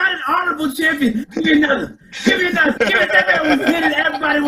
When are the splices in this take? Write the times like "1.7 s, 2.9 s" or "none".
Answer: 1.3 s, 2.8 s